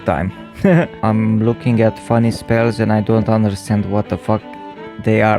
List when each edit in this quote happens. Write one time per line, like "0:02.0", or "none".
0:00.9